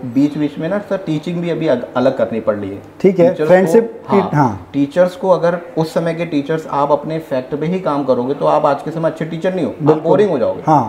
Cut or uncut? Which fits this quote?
uncut